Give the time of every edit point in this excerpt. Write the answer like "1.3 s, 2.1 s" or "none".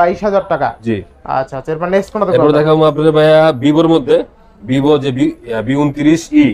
none